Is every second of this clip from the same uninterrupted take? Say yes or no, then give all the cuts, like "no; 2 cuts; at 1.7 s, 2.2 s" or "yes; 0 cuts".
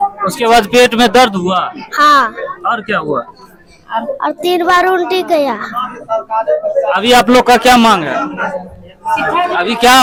yes; 0 cuts